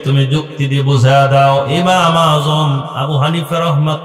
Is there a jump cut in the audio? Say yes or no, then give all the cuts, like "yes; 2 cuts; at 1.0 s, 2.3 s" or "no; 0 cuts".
no; 0 cuts